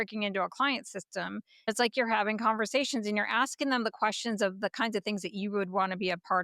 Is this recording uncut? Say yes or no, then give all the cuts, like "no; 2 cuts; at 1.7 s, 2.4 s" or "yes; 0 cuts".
no; 1 cut; at 1.7 s